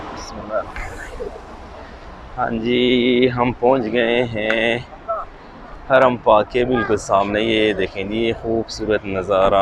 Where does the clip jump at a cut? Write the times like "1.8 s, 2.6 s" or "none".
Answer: none